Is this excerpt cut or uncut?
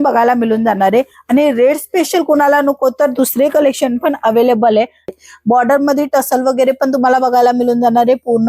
cut